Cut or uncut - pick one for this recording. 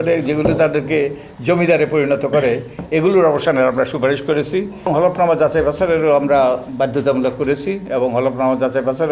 cut